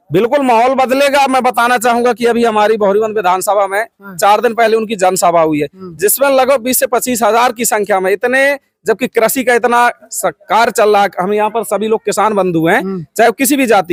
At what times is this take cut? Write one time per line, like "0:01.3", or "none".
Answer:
none